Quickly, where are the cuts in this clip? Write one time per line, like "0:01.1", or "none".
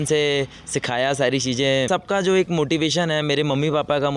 0:01.9